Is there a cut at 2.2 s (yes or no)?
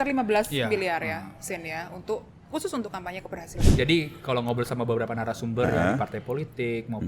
no